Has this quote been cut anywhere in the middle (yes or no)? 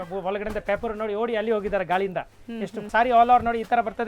yes